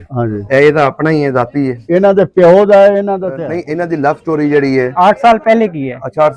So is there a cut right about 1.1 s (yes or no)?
no